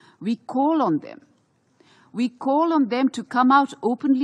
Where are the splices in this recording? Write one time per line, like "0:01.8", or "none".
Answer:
none